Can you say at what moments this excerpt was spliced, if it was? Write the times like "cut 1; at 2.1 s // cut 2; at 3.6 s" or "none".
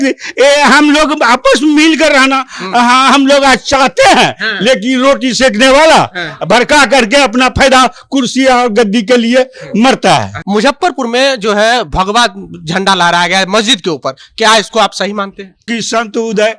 cut 1; at 10.4 s // cut 2; at 15.7 s